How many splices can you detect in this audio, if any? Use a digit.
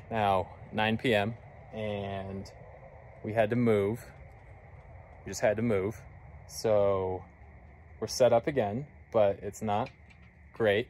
0